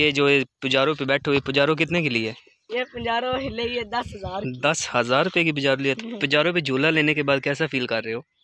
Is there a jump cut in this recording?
no; 0 cuts

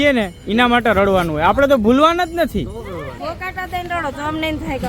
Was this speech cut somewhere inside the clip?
yes; 1 cut; at 3.2 s

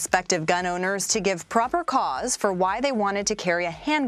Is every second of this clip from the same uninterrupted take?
yes; 0 cuts

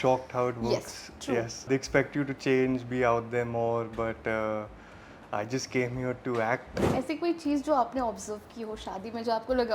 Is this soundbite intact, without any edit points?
no; 1 cut; at 6.8 s

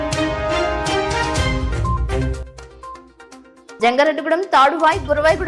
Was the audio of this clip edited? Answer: yes; 1 cut; at 2.4 s

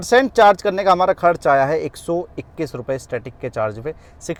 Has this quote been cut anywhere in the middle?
no; 0 cuts

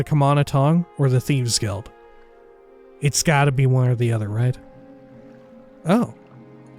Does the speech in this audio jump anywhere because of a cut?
yes; 1 cut; at 5.7 s

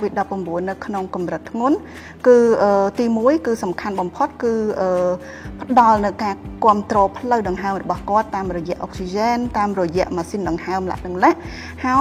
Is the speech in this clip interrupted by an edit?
no; 0 cuts

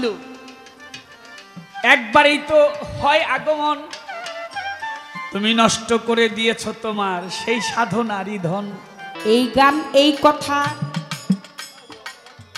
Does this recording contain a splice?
yes; 1 cut; at 9.1 s

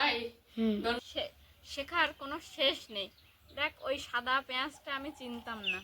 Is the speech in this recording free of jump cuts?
no; 1 cut; at 1.0 s

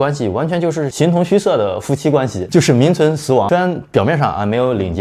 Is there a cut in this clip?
yes; 3 cuts; at 0.9 s, 2.4 s, 3.5 s

